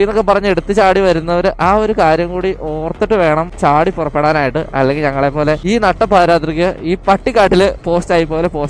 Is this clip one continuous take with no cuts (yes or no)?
no